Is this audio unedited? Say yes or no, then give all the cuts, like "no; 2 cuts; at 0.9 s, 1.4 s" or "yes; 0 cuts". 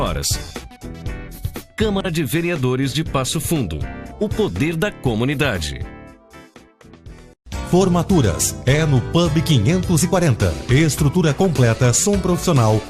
no; 1 cut; at 7.2 s